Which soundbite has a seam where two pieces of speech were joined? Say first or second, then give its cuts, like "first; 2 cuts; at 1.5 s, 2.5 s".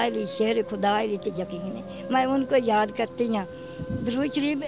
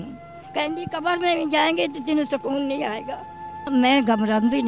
second; 1 cut; at 3.7 s